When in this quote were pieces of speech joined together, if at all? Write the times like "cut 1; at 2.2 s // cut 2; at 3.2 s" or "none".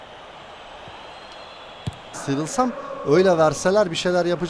cut 1; at 2.2 s